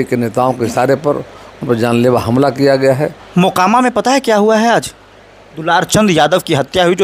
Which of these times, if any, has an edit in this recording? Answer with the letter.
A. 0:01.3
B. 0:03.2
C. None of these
B